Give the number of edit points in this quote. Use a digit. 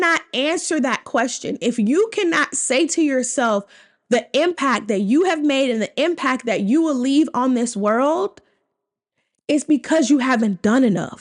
0